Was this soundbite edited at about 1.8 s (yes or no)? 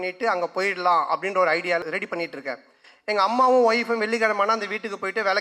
yes